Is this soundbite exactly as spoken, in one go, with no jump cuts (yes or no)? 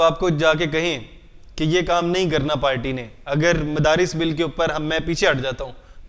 yes